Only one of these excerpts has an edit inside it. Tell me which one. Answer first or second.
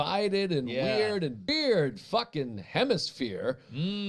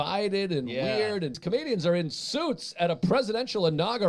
second